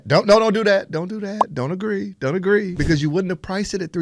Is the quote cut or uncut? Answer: cut